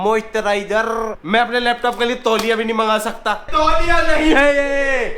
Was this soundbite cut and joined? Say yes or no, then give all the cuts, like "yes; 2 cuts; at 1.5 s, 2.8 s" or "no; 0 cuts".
yes; 2 cuts; at 1.2 s, 3.5 s